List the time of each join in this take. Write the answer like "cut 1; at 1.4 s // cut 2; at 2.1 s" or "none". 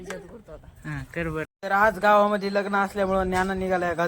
cut 1; at 1.6 s